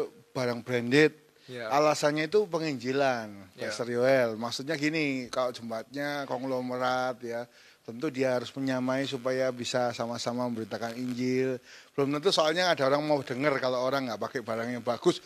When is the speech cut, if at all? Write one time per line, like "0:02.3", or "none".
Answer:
none